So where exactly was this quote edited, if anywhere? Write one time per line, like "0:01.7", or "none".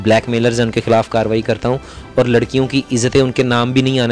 none